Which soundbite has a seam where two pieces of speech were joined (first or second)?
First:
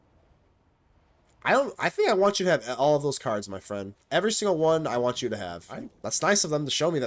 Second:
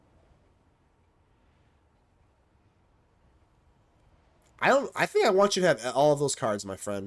first